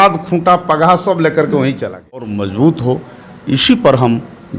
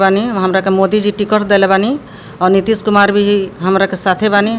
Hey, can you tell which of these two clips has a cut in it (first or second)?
first